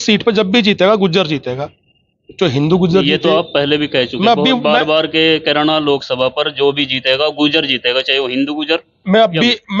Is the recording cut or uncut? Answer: uncut